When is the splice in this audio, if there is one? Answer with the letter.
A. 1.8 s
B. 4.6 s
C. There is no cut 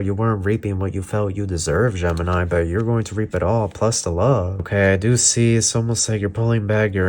B